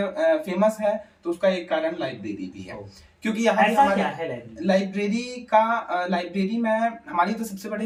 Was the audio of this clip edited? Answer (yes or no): no